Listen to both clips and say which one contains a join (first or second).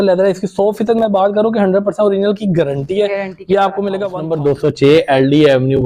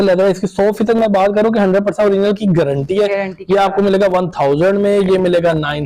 first